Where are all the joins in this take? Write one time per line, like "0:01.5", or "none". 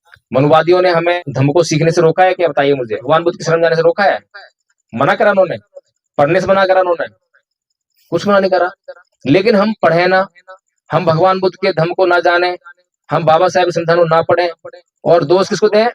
0:01.2
0:03.0